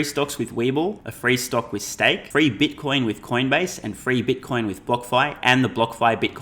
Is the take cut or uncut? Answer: cut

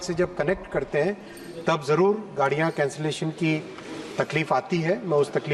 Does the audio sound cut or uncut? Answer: uncut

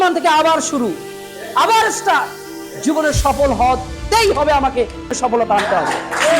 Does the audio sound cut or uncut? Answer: cut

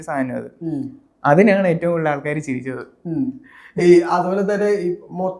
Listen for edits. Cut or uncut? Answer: uncut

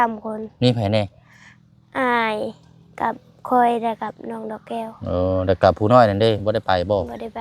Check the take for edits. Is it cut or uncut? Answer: uncut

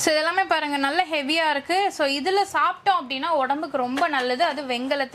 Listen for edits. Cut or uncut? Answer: uncut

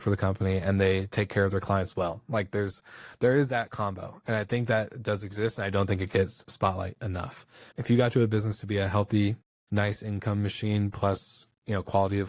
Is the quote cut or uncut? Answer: cut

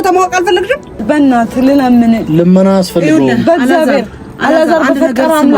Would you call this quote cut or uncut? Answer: cut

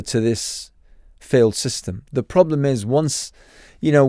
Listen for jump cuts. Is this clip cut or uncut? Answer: uncut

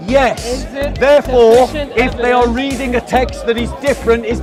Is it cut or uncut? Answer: uncut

